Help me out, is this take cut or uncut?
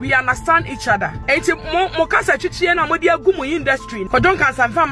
cut